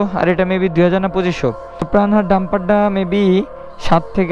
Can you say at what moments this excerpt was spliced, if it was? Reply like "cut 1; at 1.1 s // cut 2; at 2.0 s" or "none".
cut 1; at 1.9 s